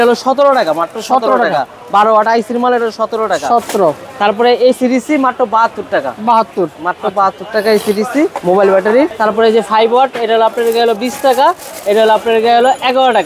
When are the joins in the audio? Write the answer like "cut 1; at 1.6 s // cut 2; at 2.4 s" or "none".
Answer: none